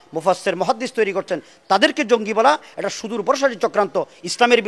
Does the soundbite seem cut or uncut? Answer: uncut